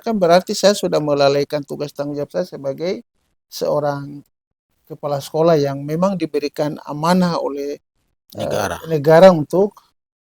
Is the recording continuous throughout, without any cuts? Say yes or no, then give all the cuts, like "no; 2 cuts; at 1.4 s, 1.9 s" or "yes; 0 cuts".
yes; 0 cuts